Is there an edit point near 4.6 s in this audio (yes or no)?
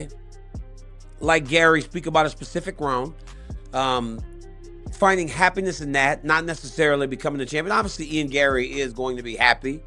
no